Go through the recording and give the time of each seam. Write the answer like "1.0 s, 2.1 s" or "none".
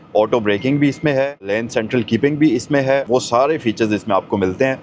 3.0 s